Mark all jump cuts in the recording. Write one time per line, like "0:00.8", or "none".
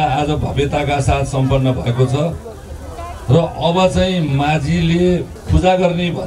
none

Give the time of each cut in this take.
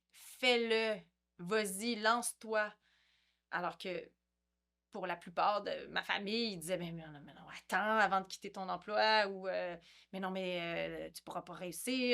none

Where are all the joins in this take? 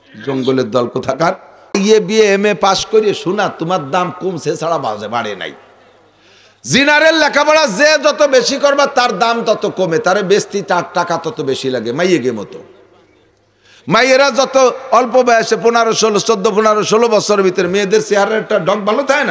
0:01.7

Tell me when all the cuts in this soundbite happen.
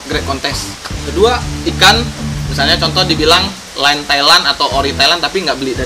0:00.9
0:01.5

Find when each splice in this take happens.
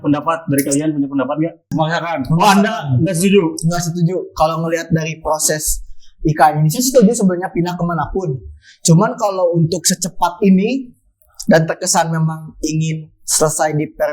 0:01.6

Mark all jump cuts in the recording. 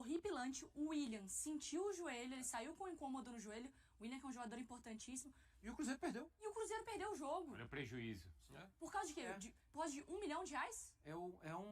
0:05.4

